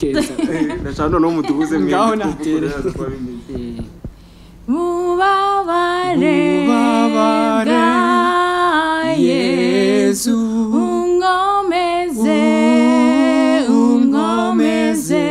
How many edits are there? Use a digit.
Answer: 0